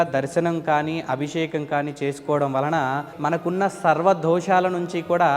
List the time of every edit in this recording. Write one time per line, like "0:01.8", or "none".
0:03.1